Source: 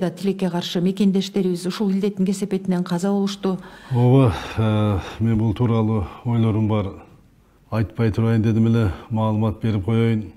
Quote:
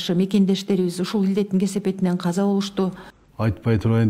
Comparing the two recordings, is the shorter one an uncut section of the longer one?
no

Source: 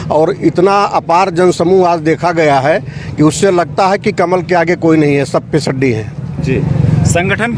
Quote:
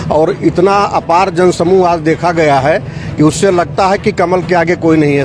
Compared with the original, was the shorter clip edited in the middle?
no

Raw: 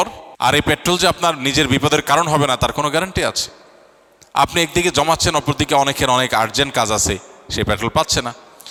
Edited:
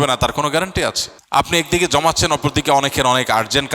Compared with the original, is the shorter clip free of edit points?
no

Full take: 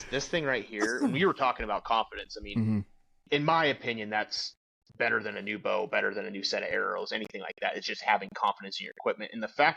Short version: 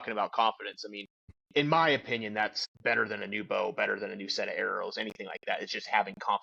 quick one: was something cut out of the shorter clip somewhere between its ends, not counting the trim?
yes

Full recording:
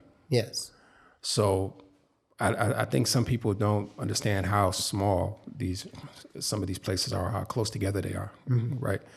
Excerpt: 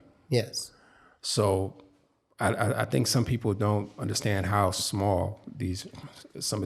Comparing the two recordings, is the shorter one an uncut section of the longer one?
yes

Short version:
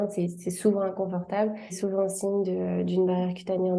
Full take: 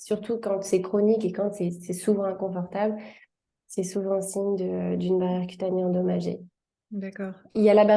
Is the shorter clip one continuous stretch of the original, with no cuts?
no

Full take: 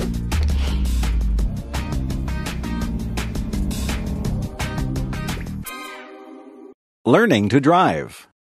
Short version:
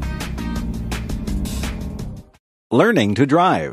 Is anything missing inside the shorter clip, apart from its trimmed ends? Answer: yes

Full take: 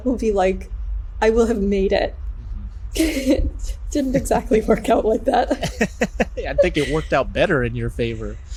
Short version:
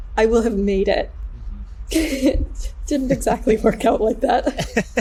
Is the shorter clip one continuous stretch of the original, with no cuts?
yes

